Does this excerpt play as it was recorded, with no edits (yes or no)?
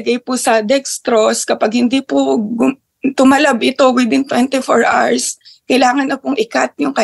yes